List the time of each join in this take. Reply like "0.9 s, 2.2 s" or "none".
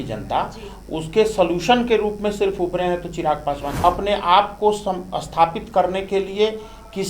3.7 s